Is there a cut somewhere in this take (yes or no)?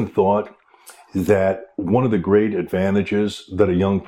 no